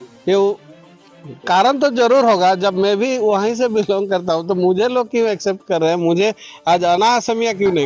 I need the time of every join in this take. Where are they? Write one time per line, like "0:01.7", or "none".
none